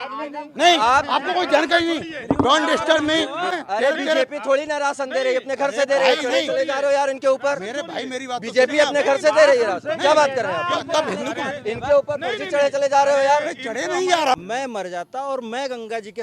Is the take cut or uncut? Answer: cut